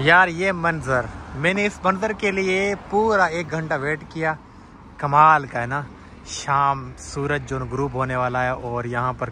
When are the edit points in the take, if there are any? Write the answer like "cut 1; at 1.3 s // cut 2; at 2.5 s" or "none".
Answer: none